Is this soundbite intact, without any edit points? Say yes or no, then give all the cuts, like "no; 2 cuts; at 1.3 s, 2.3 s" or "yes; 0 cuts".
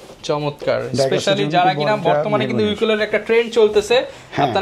yes; 0 cuts